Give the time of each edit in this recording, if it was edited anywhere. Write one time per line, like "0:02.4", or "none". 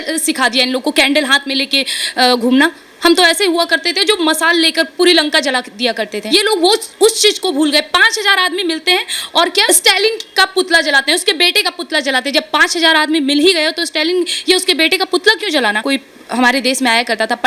0:06.2
0:09.6
0:15.8